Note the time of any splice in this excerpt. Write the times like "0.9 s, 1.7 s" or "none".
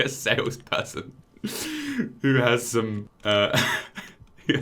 3.1 s